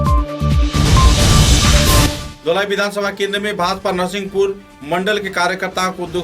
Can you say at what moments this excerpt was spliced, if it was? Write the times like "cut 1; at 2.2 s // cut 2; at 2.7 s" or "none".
cut 1; at 2.1 s